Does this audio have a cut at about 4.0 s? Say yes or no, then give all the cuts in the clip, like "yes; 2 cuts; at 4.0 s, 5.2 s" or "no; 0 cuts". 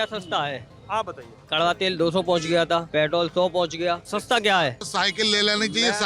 yes; 3 cuts; at 2.9 s, 4.0 s, 4.9 s